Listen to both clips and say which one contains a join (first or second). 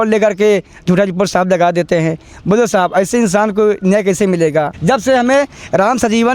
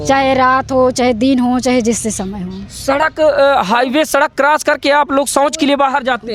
first